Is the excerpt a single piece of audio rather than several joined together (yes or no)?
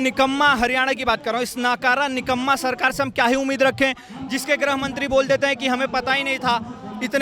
yes